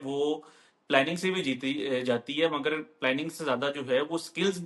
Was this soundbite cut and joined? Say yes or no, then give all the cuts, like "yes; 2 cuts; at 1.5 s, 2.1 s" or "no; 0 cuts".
no; 0 cuts